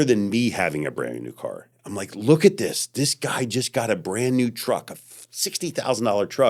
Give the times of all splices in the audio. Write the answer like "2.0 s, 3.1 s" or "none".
none